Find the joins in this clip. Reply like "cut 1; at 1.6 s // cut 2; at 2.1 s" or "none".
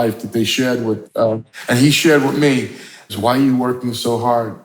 cut 1; at 1.5 s // cut 2; at 3.1 s